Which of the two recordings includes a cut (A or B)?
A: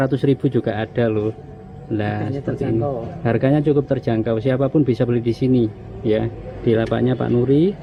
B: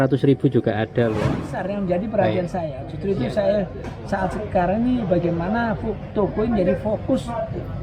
B